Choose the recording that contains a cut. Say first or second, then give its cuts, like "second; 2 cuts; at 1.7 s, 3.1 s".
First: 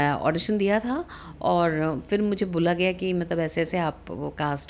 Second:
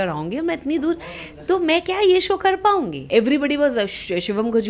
second; 1 cut; at 3.0 s